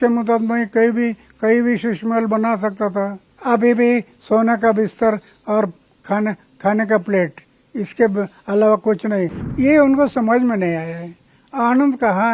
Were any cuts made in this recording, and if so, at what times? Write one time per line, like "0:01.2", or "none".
0:03.3
0:09.4